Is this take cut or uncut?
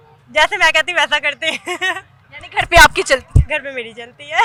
uncut